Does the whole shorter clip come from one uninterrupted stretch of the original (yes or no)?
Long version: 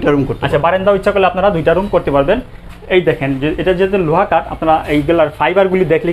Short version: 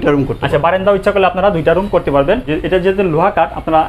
no